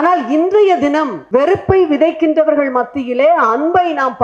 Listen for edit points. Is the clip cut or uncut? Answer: cut